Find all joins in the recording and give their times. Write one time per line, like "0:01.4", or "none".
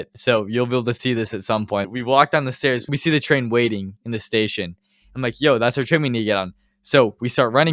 0:01.9
0:02.9
0:03.9